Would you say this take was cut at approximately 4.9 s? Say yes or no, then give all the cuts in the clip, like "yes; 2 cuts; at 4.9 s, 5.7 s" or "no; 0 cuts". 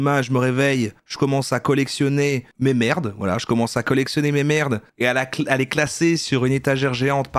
no; 0 cuts